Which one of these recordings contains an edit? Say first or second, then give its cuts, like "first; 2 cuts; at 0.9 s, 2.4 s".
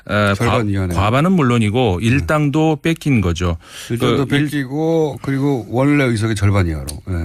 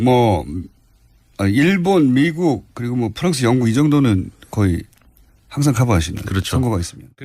second; 1 cut; at 4.5 s